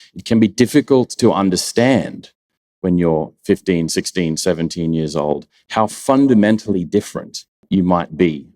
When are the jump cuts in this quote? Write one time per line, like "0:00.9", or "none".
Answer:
0:07.6